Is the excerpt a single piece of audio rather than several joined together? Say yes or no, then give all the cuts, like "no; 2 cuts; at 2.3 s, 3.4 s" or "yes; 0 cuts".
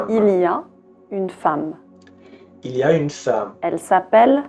yes; 0 cuts